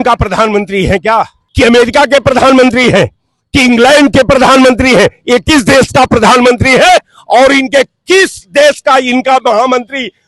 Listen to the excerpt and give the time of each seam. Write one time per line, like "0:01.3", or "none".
0:01.4